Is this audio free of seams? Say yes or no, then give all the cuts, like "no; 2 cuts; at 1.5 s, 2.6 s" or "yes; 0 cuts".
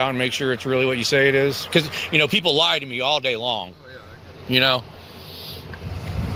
yes; 0 cuts